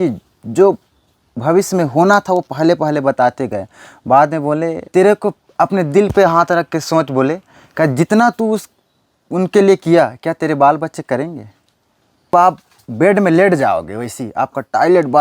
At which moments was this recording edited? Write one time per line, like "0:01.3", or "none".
0:04.9
0:12.3